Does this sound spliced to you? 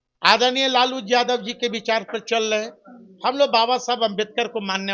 no; 0 cuts

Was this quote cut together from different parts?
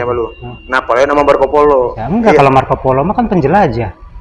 no; 0 cuts

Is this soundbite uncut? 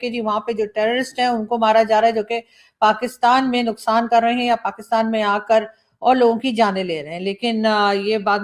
yes; 0 cuts

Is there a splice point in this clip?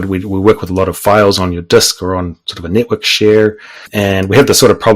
yes; 1 cut; at 3.9 s

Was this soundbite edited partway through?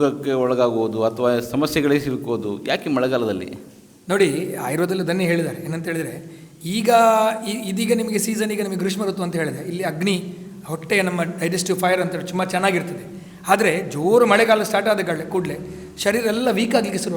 no; 0 cuts

